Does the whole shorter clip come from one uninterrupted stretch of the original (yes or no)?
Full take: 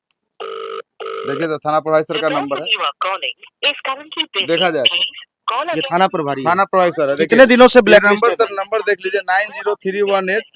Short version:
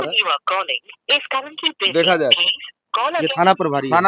yes